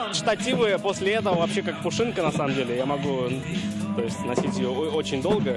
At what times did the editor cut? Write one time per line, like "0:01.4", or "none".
none